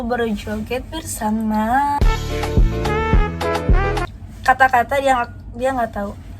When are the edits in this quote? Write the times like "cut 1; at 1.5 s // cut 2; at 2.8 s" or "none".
cut 1; at 4.2 s